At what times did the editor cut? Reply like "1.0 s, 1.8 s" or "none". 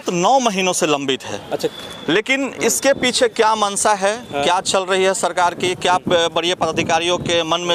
none